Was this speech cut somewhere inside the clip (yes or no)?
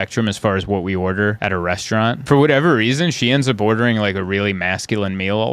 yes